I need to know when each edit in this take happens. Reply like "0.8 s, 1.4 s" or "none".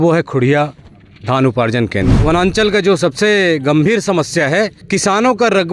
2.2 s, 4.8 s

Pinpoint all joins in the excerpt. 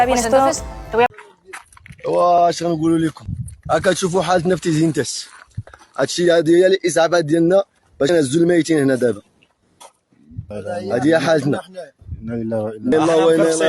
1.1 s

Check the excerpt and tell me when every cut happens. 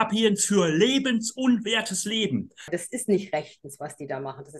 2.7 s

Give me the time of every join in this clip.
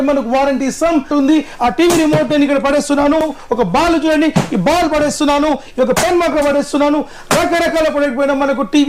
1.1 s, 3.2 s

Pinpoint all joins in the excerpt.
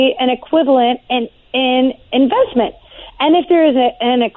none

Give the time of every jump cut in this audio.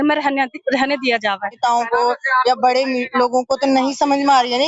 1.6 s

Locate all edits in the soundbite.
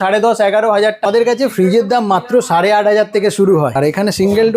1.1 s, 3.8 s

